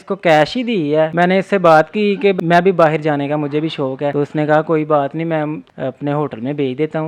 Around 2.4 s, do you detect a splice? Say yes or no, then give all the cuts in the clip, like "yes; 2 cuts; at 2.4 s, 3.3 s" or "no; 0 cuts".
yes; 4 cuts; at 1.1 s, 2.4 s, 4.1 s, 5.6 s